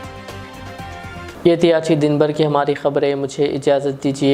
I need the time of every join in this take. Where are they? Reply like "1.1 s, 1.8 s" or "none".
none